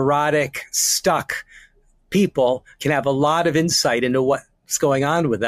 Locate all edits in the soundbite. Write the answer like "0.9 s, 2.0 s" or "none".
none